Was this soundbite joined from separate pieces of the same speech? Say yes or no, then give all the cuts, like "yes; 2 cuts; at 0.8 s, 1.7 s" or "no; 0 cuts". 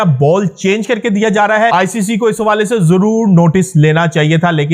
yes; 1 cut; at 1.7 s